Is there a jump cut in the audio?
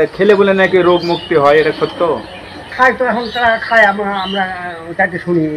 no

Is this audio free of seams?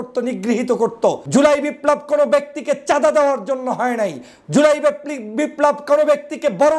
no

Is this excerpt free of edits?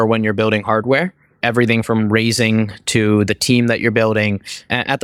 yes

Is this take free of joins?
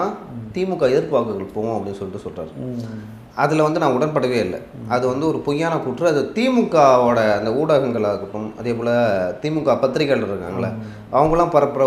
yes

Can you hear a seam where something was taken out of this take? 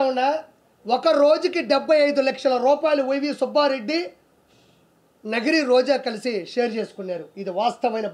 no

